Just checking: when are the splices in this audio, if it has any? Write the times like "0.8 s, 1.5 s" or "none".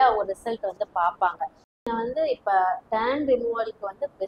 1.5 s